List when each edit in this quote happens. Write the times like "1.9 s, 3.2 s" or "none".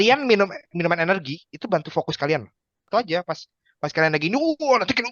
2.9 s